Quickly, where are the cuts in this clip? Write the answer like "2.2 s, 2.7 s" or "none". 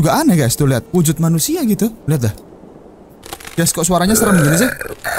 3.2 s

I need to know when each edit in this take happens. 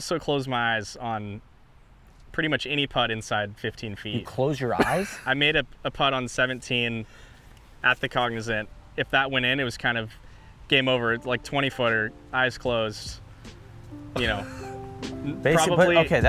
5.2 s, 8.7 s

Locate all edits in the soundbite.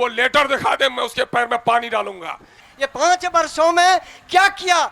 2.6 s

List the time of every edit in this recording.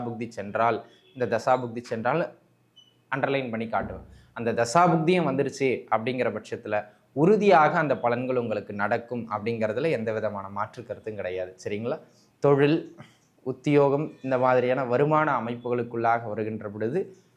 12.2 s

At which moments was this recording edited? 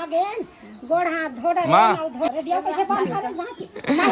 2.3 s

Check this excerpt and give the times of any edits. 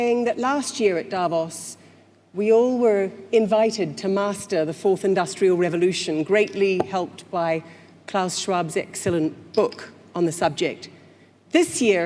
1.5 s

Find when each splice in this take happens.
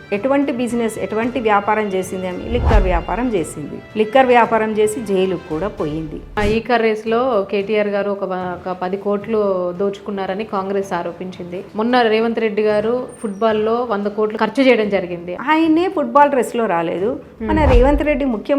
6.4 s, 14.4 s, 15.3 s

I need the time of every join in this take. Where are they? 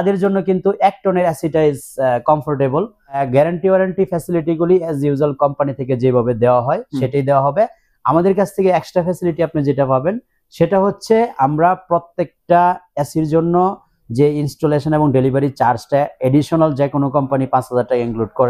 3.2 s

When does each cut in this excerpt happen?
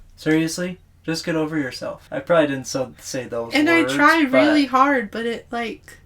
2.0 s

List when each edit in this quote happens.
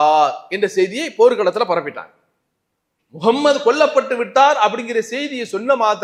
none

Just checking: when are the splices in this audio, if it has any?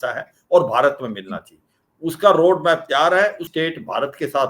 3.4 s

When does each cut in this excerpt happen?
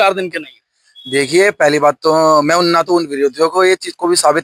none

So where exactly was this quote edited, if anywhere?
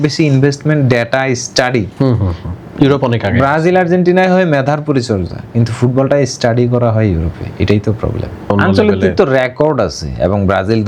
8.5 s

